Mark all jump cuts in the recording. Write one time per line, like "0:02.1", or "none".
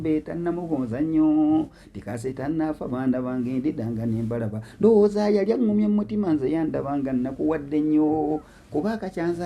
none